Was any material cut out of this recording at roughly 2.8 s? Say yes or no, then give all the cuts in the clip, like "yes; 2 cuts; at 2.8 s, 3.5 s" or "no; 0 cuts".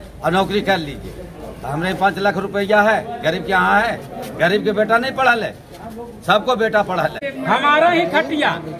no; 1 cut; at 7.3 s